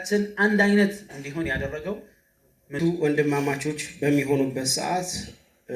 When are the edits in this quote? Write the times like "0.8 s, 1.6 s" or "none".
2.8 s